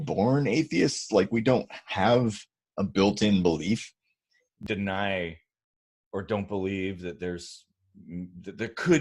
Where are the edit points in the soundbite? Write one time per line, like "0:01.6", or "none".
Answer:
0:04.5